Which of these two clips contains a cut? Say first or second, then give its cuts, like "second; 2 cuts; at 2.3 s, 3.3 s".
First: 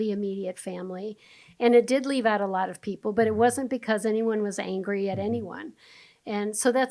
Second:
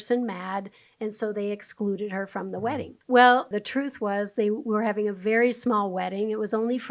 second; 2 cuts; at 2.9 s, 3.5 s